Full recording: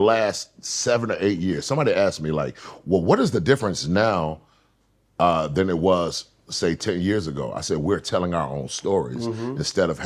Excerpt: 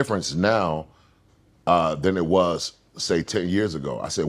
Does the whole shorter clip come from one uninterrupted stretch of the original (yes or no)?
yes